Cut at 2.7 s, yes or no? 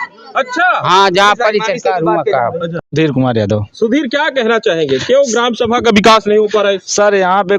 yes